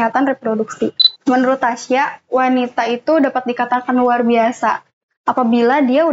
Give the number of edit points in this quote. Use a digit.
1